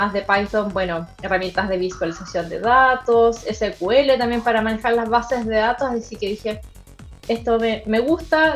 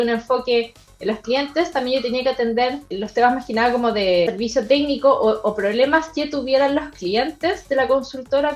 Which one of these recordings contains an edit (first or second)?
second